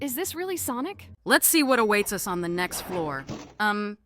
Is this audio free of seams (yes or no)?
no